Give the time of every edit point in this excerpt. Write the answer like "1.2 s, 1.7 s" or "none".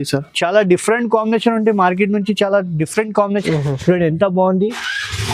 3.4 s